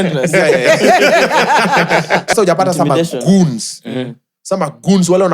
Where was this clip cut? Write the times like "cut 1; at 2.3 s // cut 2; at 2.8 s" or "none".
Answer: cut 1; at 2.3 s